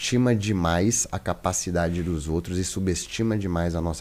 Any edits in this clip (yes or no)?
no